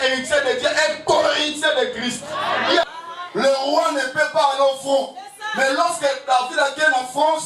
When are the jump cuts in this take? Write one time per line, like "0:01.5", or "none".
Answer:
0:02.9